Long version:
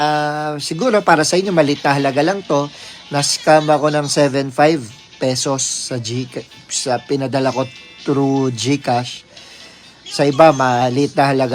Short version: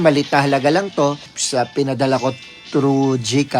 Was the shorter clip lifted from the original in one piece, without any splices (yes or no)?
no